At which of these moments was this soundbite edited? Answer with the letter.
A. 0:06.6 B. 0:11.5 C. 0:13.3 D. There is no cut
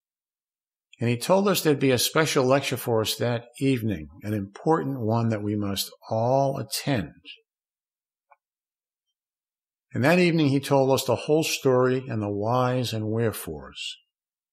B